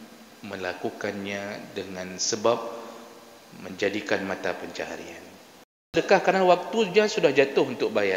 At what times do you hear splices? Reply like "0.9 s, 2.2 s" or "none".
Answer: 5.9 s